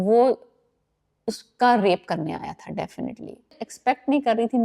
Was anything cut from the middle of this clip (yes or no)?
yes